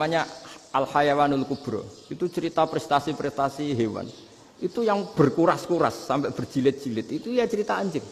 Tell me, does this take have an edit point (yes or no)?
no